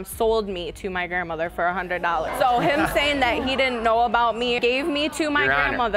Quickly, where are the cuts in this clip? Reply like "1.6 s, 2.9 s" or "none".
4.6 s